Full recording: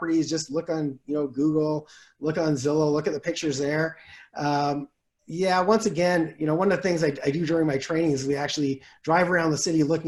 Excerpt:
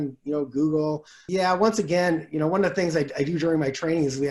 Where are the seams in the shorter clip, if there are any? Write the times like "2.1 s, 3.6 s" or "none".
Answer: 1.1 s

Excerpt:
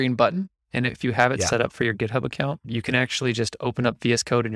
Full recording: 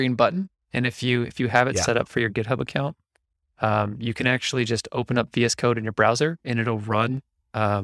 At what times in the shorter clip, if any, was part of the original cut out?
1.0 s, 2.6 s

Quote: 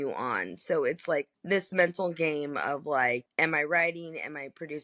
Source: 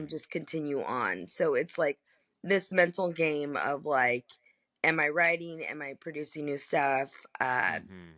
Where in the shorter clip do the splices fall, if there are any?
1.3 s, 3.3 s

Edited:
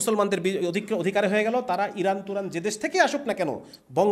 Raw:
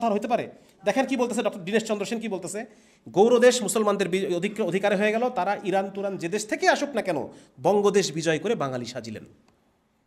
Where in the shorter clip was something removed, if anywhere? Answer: none

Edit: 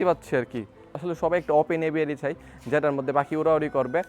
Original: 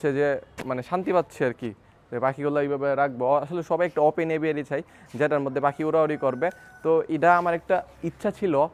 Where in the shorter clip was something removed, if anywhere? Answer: 1.0 s

